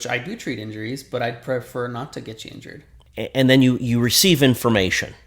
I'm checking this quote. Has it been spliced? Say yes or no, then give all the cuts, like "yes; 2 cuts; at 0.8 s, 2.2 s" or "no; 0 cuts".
yes; 1 cut; at 3.0 s